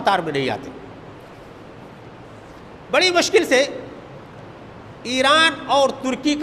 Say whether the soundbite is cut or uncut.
uncut